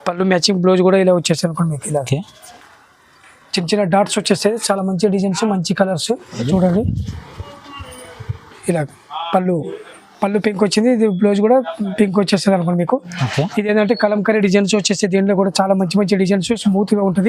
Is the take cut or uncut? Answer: cut